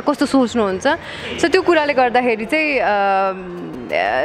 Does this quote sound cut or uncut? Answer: uncut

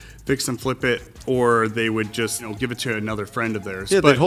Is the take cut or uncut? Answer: cut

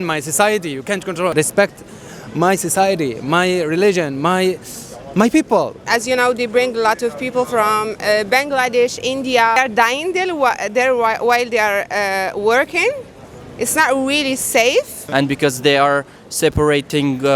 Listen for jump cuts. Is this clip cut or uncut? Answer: cut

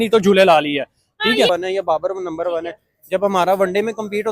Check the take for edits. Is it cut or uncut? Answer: cut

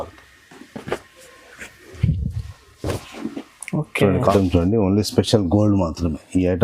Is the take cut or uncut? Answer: cut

